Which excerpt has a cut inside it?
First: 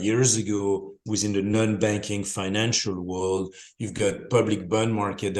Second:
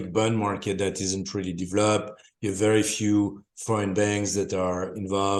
first; 1 cut; at 1.0 s

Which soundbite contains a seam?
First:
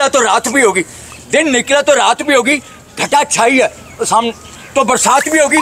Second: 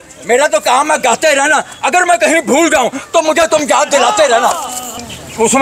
second; 1 cut; at 4.6 s

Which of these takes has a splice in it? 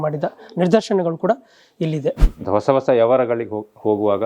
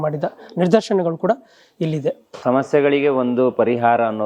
first; 1 cut; at 2.3 s

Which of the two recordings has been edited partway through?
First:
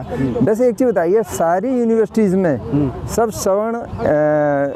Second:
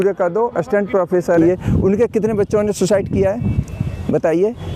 second; 1 cut; at 1.4 s

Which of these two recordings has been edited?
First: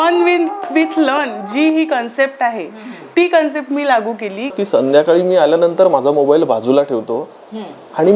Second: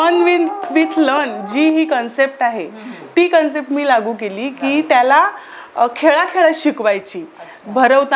first; 1 cut; at 4.6 s

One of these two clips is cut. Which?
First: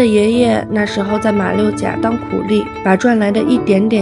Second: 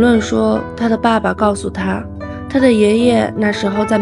first; 1 cut; at 2.7 s

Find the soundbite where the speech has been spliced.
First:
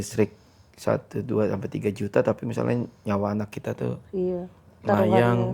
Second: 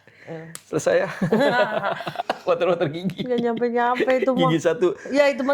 second; 1 cut; at 2.2 s

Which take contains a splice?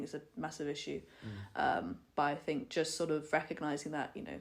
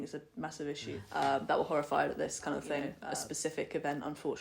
second; 2 cuts; at 1.0 s, 3.0 s

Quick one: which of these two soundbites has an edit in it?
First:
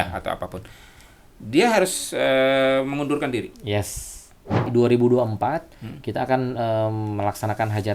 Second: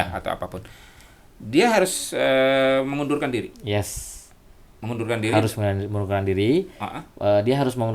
first; 1 cut; at 4.7 s

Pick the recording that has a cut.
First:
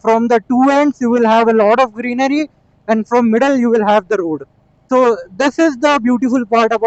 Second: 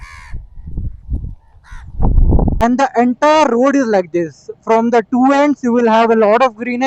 second; 1 cut; at 2.6 s

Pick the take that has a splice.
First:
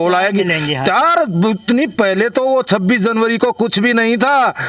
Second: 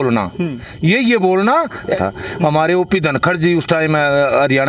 second; 1 cut; at 2.0 s

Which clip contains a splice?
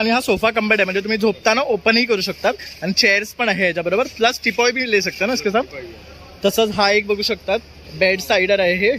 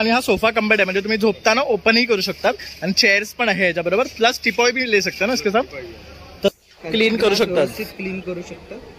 second; 1 cut; at 6.5 s

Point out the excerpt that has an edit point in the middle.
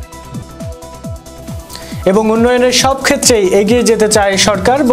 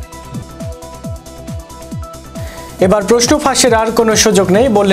second; 2 cuts; at 1.4 s, 2.8 s

